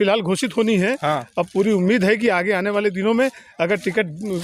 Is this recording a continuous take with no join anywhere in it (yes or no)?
yes